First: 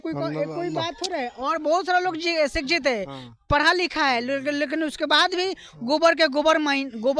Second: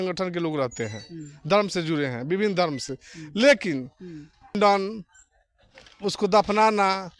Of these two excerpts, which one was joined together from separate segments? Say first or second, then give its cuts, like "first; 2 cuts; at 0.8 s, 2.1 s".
second; 1 cut; at 4.5 s